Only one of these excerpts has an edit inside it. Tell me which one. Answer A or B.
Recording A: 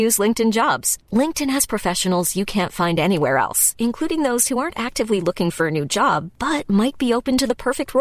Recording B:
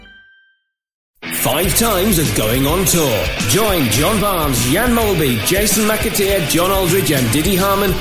B